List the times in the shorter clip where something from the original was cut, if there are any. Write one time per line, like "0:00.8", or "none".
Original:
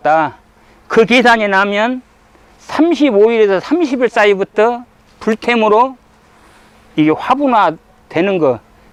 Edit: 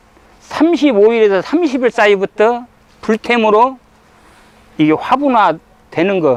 none